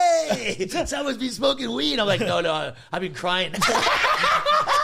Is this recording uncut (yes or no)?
yes